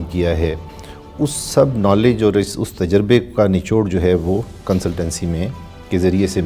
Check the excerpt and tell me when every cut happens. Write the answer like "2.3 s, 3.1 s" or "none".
none